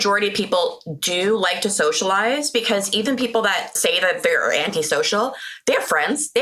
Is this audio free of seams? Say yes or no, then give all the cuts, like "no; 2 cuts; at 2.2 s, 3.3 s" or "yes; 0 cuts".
no; 1 cut; at 3.7 s